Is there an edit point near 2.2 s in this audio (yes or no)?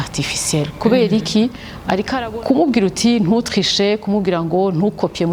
yes